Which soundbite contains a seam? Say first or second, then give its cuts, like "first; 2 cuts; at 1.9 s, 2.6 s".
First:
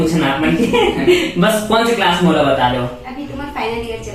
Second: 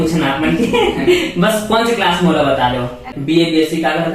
second; 1 cut; at 3.1 s